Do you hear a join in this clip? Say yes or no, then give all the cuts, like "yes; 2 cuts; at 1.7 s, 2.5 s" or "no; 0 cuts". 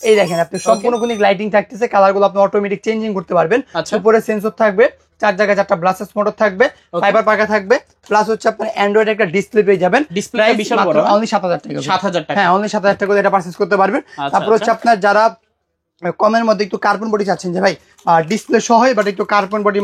no; 0 cuts